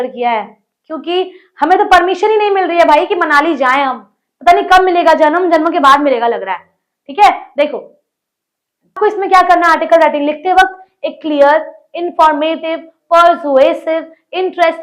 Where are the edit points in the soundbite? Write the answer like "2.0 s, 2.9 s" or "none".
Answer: 9.0 s